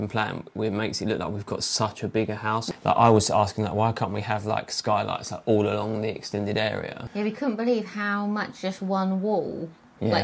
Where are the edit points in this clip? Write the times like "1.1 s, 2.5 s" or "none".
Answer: 2.6 s, 7.0 s